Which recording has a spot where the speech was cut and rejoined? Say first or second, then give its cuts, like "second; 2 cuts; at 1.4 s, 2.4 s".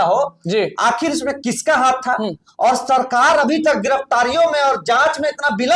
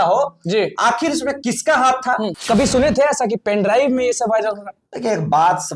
second; 1 cut; at 2.4 s